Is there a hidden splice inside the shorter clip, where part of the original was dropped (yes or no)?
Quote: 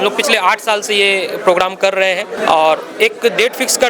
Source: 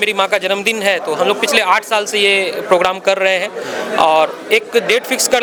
yes